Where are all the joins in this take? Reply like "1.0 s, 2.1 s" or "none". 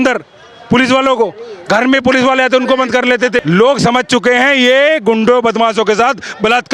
3.4 s